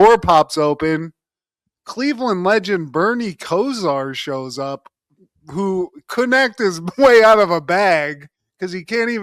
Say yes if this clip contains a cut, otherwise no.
no